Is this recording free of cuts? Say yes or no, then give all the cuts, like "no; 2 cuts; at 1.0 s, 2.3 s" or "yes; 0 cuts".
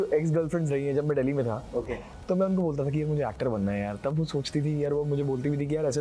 yes; 0 cuts